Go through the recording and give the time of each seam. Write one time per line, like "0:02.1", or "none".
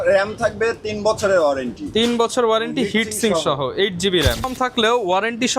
0:04.5